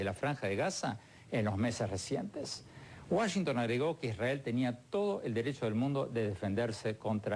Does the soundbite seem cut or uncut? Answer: cut